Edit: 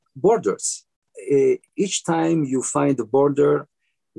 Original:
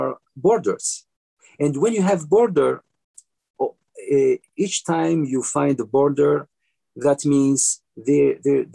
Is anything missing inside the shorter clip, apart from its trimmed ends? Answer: yes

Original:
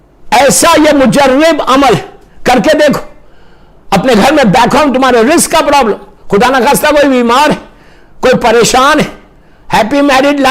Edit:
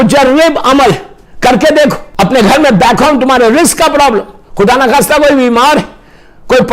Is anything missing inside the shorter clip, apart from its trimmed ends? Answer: yes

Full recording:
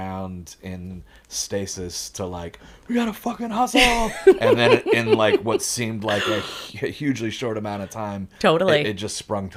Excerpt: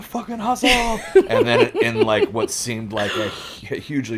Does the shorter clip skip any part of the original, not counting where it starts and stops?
no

